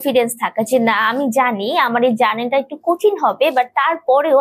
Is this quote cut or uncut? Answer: uncut